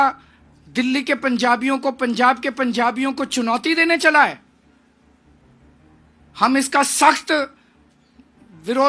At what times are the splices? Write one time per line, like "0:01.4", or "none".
none